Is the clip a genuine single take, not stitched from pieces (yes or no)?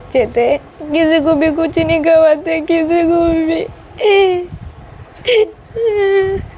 yes